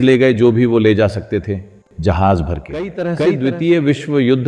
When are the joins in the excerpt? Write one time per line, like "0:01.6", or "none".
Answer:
0:03.1

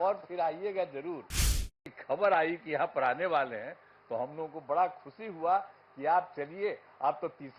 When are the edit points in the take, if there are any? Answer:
0:01.7

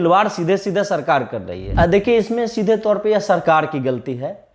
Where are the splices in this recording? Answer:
0:01.6

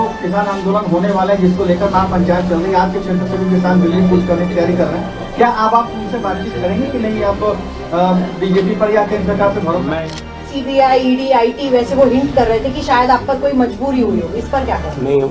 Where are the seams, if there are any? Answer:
0:10.1

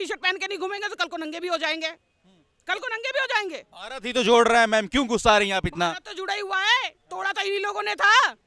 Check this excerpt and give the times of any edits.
none

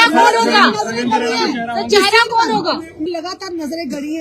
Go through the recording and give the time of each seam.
0:03.1

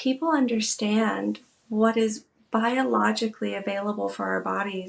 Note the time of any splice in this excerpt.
none

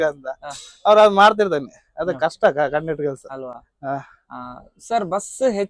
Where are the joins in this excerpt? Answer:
none

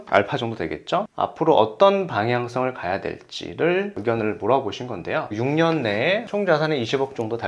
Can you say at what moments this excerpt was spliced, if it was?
0:05.3
0:06.3

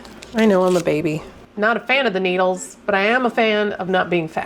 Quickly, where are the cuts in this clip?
0:01.4

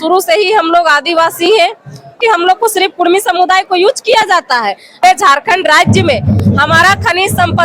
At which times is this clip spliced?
0:02.2
0:05.0

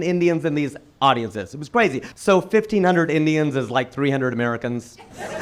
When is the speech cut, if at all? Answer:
0:02.0

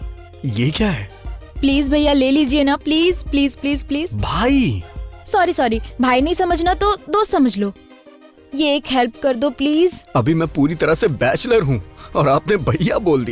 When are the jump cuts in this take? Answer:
0:10.0

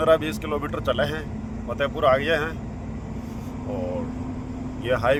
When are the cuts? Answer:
none

